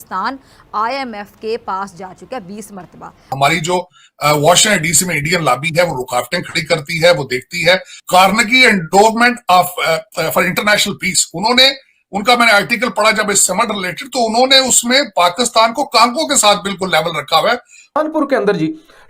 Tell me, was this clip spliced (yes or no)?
yes